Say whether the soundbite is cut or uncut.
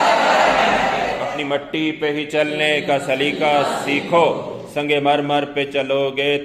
cut